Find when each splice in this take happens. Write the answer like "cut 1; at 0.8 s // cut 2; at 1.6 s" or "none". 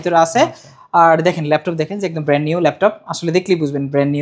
none